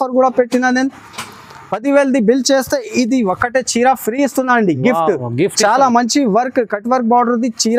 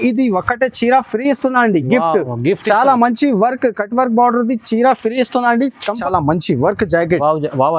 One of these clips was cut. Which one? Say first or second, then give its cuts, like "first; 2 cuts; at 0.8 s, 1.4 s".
second; 1 cut; at 6.0 s